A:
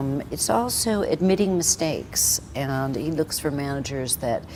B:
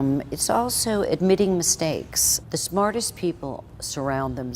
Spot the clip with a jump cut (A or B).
B